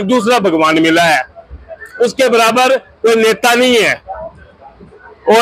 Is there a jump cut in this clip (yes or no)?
no